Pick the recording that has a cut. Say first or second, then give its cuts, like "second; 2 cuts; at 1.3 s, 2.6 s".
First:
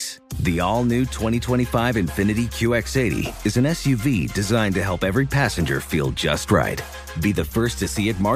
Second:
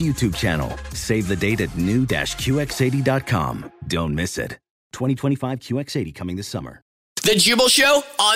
second; 1 cut; at 7.1 s